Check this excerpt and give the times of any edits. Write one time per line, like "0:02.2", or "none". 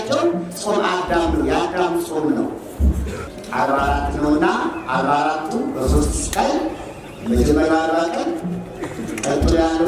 0:03.2

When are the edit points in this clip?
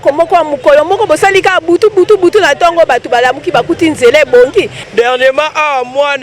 0:04.8

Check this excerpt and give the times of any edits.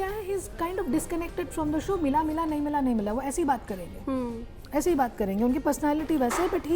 none

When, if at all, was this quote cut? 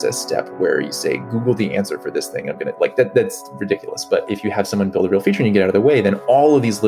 0:04.3

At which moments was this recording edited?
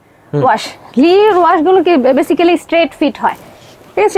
none

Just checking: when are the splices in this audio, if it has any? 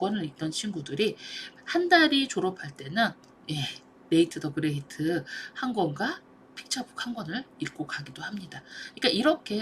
none

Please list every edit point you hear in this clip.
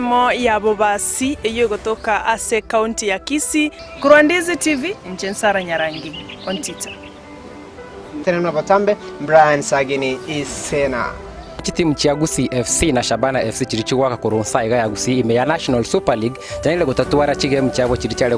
none

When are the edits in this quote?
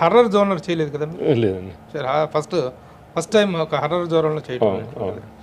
none

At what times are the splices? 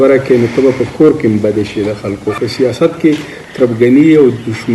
0:02.4

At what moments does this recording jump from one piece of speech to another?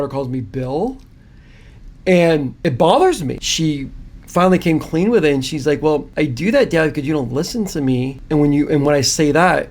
0:02.5
0:03.4
0:06.1
0:08.2

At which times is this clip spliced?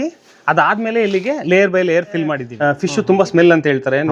0:02.5

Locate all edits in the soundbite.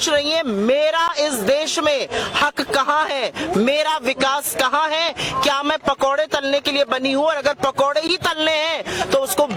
none

